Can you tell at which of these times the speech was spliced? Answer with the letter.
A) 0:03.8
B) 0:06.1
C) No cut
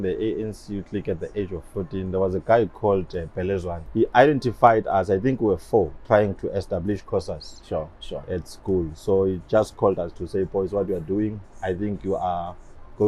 A